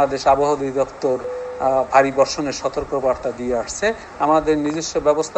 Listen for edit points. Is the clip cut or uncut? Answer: cut